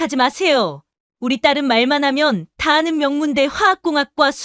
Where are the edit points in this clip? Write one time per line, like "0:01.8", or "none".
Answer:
none